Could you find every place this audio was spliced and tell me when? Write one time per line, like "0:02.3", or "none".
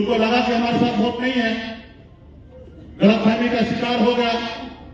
none